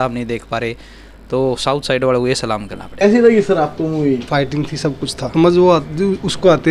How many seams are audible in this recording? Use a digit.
2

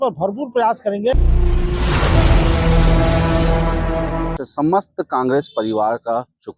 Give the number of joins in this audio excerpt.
2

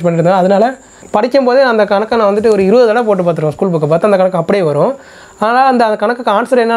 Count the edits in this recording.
1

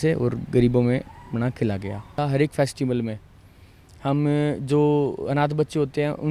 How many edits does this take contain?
1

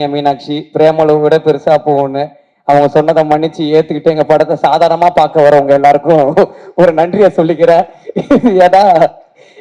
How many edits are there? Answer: 0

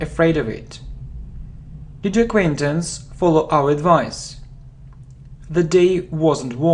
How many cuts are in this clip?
1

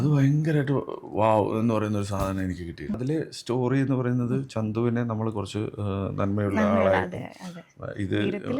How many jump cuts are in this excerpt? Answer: 1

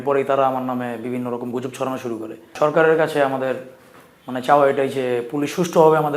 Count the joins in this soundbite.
1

